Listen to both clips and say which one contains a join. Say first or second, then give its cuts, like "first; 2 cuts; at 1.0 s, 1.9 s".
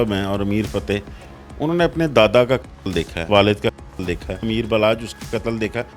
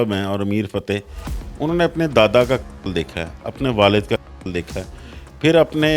first; 2 cuts; at 3.3 s, 4.4 s